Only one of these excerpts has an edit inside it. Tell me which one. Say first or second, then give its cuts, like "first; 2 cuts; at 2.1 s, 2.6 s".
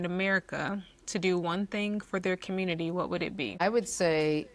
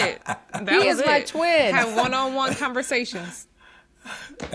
first; 1 cut; at 3.6 s